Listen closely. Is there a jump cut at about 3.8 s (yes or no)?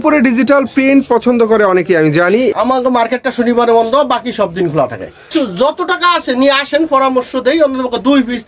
no